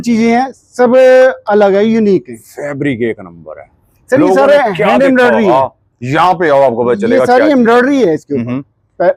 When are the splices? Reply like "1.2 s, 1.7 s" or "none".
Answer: none